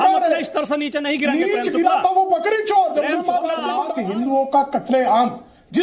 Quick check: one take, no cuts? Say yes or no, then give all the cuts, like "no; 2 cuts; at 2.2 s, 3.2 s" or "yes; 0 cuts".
no; 1 cut; at 3.9 s